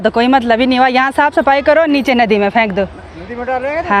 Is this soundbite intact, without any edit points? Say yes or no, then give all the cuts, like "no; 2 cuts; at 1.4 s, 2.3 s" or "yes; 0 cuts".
yes; 0 cuts